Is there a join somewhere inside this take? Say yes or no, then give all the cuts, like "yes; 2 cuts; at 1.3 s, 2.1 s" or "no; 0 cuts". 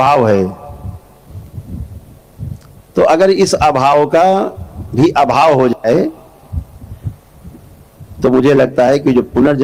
no; 0 cuts